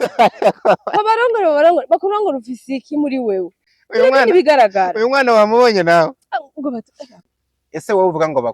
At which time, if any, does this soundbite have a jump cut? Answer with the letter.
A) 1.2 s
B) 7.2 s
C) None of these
B